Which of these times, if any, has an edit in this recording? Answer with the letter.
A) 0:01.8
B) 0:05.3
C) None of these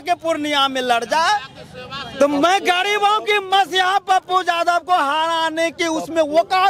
C